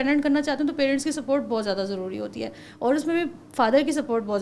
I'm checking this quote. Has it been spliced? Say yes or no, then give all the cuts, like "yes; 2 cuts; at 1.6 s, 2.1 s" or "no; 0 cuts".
no; 0 cuts